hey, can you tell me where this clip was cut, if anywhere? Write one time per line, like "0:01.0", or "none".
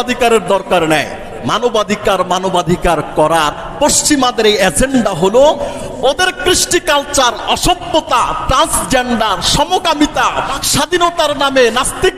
0:01.4
0:10.6